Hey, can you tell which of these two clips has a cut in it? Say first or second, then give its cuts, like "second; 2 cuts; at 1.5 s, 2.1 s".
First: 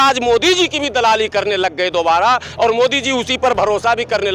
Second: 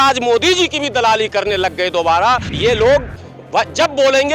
second; 1 cut; at 2.5 s